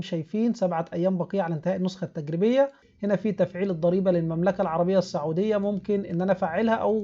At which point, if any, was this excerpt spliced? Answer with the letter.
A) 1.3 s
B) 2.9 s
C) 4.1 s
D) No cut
B